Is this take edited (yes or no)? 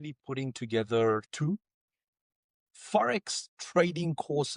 no